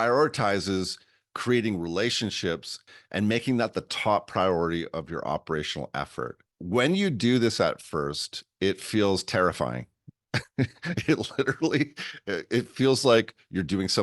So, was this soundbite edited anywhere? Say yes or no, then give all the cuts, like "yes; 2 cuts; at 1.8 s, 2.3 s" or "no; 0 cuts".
yes; 2 cuts; at 2.8 s, 6.5 s